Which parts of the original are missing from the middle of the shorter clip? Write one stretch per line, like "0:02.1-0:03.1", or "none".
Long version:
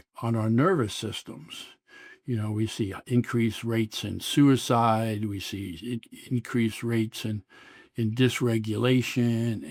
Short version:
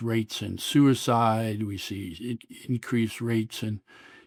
none